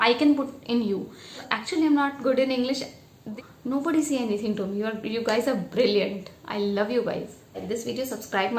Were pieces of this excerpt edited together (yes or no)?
yes